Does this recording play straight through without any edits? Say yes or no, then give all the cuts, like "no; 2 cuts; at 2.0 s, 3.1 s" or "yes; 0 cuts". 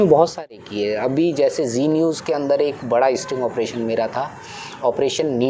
yes; 0 cuts